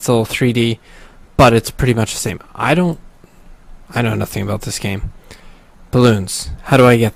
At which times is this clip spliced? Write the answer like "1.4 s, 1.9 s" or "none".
4.8 s